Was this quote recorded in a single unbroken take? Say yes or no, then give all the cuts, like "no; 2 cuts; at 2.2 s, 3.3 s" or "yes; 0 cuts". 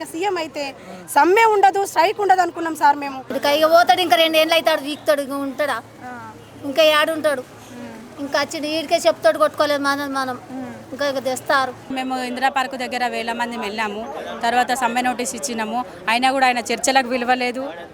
no; 2 cuts; at 3.3 s, 11.9 s